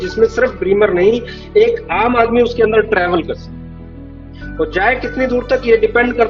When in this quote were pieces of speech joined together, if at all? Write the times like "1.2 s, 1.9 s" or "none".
none

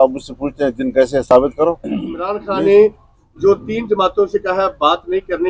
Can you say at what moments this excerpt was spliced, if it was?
2.3 s

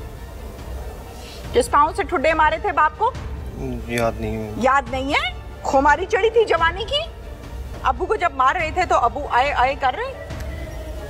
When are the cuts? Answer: 7.6 s

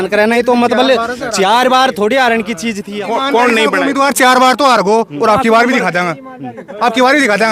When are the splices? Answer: 2.9 s

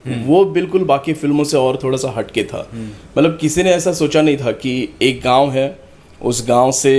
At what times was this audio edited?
none

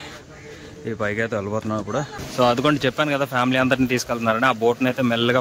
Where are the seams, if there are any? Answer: 2.0 s

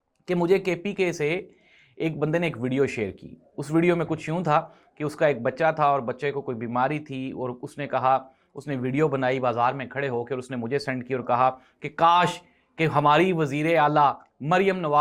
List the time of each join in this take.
none

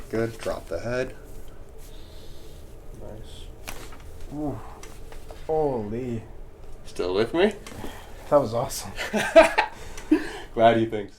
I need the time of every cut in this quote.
5.3 s

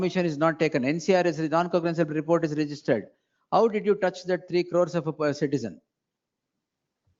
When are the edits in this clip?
none

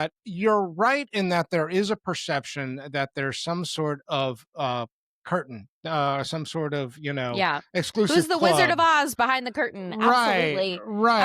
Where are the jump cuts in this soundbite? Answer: none

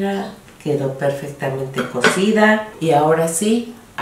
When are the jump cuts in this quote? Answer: 2.7 s

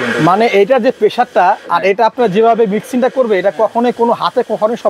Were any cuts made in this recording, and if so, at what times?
none

